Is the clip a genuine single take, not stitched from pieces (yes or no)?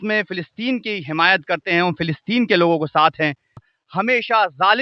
no